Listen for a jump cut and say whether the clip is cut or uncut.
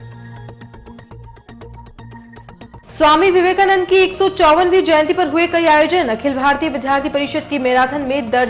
cut